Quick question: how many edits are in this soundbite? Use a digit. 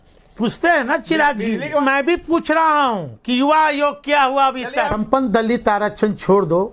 2